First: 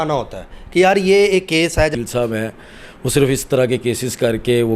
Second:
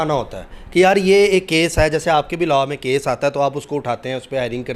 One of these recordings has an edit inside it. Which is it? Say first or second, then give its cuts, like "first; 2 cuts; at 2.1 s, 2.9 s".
first; 1 cut; at 1.9 s